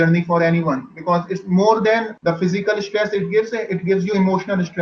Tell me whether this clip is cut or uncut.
cut